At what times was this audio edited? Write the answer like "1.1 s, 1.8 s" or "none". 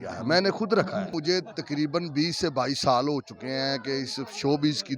1.1 s